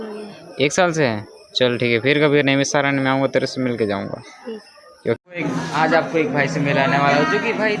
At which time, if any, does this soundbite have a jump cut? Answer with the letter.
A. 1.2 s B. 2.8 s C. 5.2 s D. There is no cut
C